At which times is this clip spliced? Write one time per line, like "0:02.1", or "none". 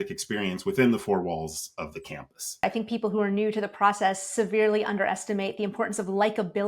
0:02.6